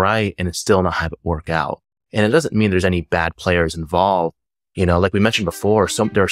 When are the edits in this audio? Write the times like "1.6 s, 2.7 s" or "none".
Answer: none